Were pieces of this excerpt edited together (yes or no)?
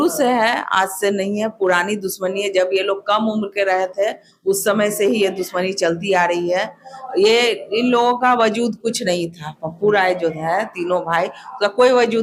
no